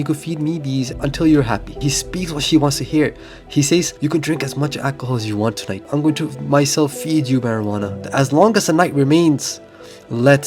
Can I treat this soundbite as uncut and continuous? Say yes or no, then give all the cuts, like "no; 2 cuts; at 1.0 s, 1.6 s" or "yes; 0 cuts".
no; 5 cuts; at 0.9 s, 1.8 s, 3.9 s, 5.9 s, 8.0 s